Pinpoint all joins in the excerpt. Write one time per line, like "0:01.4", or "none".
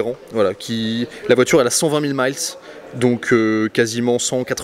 none